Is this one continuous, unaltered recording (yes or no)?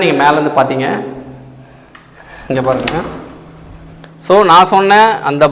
yes